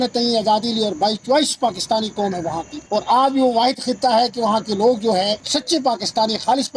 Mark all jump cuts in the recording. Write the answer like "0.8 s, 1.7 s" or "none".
2.7 s, 5.5 s

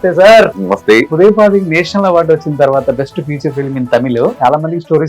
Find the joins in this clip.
1.1 s, 4.4 s

